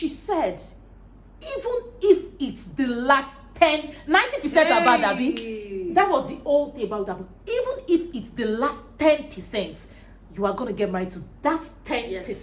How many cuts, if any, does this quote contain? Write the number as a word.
zero